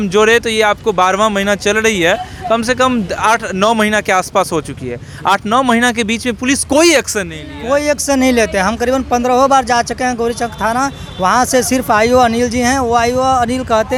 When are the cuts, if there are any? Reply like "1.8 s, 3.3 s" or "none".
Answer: none